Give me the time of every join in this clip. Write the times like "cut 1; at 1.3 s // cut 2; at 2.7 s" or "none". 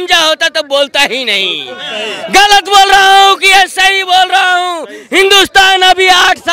none